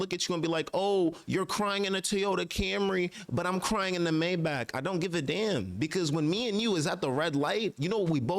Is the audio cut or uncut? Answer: uncut